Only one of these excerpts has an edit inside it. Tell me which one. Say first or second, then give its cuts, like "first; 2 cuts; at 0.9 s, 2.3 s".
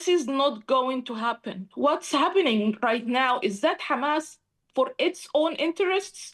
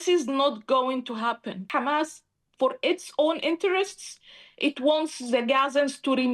second; 1 cut; at 1.7 s